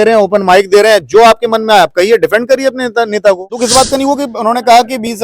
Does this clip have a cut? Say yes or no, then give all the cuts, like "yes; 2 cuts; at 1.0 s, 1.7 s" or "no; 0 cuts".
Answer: yes; 1 cut; at 3.5 s